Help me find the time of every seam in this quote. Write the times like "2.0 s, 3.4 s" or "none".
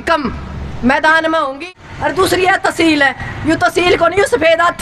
1.6 s